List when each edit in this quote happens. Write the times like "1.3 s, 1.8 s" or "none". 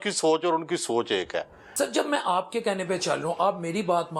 1.7 s